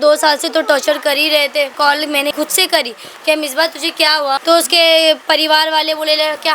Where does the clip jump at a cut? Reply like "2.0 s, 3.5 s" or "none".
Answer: 2.2 s, 4.4 s

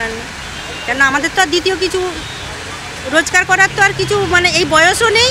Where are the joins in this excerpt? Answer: none

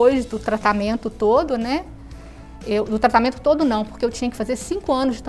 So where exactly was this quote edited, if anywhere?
none

